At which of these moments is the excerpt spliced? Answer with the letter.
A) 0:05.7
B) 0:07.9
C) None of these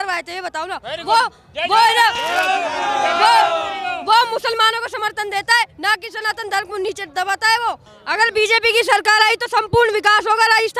B